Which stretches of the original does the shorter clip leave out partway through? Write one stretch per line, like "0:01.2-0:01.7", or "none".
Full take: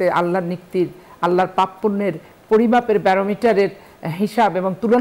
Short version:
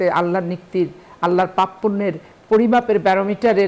none